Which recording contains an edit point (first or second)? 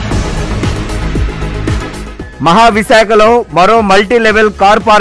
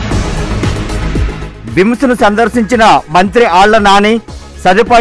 second